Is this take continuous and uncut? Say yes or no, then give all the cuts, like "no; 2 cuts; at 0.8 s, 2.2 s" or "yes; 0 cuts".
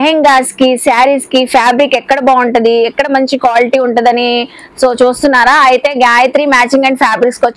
yes; 0 cuts